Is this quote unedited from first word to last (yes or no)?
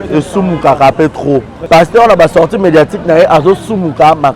no